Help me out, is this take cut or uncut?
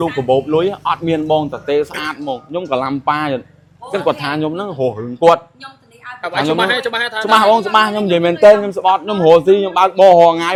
uncut